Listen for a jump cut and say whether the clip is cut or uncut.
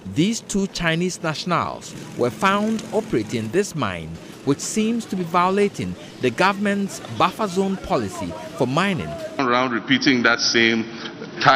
cut